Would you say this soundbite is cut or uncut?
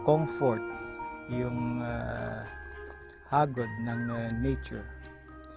uncut